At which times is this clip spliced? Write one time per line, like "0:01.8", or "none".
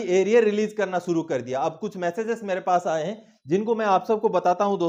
none